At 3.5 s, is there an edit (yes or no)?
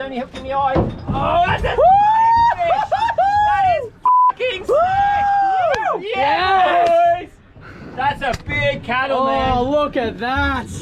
no